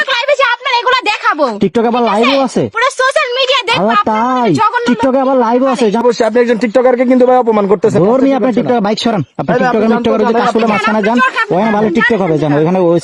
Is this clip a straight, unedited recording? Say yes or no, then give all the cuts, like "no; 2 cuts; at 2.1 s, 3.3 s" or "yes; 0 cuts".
yes; 0 cuts